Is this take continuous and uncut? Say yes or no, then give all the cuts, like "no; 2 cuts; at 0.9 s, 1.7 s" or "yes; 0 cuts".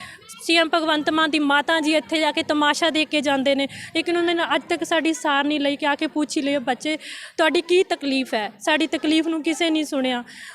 yes; 0 cuts